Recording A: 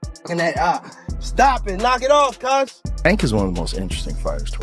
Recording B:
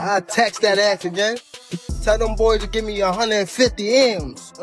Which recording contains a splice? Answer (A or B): A